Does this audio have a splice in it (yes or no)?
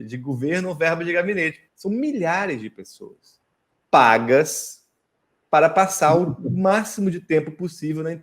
yes